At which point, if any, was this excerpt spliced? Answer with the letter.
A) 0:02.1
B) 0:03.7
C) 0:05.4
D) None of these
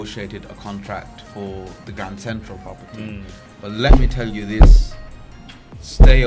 D